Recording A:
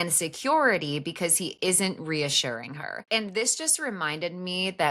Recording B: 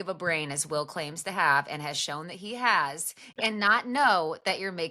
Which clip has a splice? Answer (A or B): A